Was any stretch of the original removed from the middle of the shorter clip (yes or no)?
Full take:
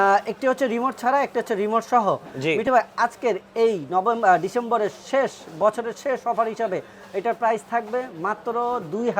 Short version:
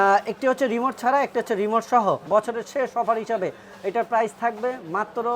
yes